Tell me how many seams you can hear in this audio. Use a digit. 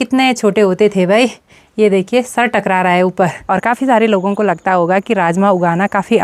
1